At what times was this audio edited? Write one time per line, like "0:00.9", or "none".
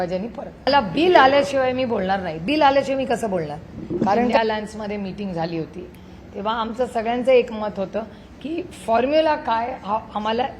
0:00.7
0:04.4

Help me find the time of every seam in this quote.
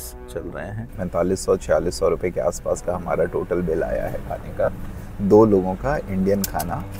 0:01.0

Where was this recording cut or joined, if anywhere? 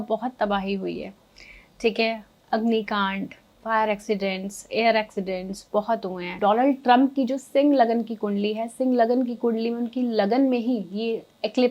0:06.3

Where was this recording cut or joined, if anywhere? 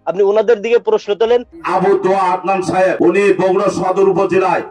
0:01.6
0:03.0

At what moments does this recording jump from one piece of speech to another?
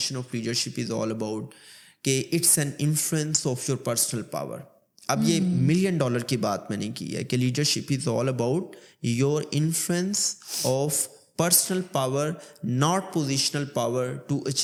none

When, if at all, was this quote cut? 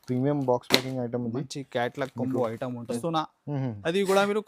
0:03.0

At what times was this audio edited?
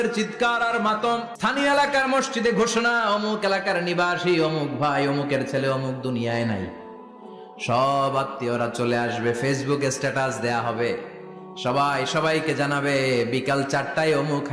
0:01.3

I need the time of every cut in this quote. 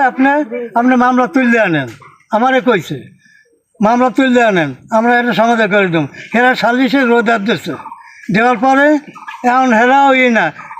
none

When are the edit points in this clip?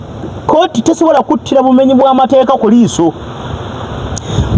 none

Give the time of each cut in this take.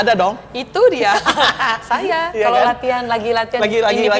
none

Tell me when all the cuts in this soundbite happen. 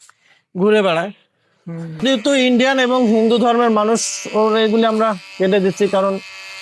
0:02.0

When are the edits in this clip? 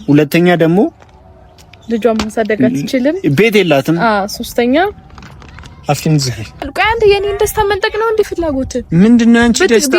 0:06.7

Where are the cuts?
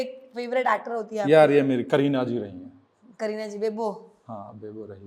none

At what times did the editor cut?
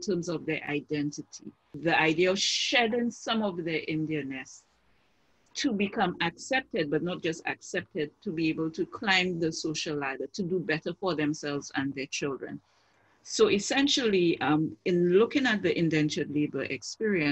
0:01.7

